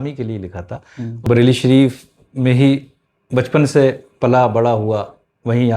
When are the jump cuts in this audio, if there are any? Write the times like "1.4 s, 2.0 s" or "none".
1.3 s